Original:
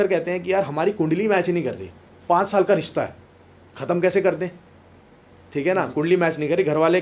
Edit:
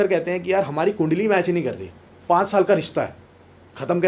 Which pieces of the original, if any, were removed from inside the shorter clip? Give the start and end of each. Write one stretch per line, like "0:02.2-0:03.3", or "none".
none